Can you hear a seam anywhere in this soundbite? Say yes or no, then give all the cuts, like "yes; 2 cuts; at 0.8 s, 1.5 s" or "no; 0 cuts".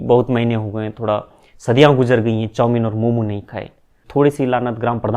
yes; 1 cut; at 4.0 s